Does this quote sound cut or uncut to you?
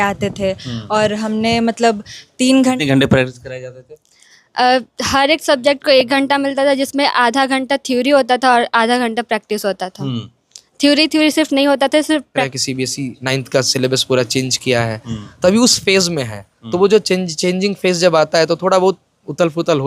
cut